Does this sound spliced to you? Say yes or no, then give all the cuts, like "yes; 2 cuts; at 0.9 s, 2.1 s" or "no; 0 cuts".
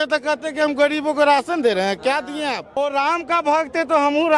yes; 1 cut; at 2.8 s